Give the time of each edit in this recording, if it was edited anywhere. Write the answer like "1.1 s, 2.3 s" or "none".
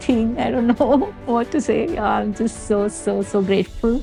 none

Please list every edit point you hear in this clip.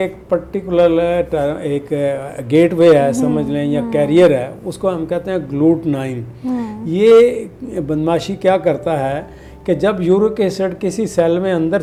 none

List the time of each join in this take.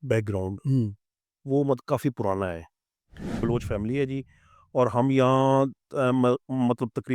3.4 s

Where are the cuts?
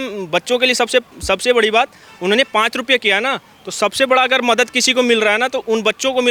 none

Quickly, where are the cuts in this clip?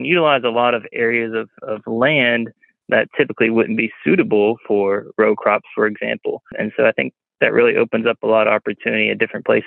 6.5 s

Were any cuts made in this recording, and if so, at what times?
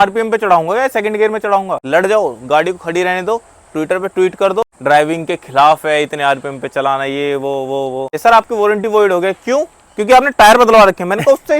1.8 s, 4.6 s, 8.1 s

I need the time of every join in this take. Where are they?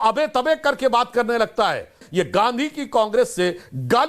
2.0 s

